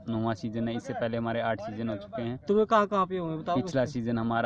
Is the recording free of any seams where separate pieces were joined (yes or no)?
yes